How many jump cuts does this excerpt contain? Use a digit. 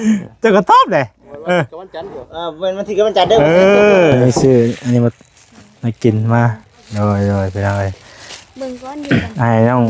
1